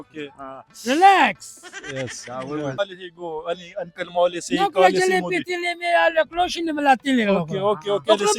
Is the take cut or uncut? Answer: cut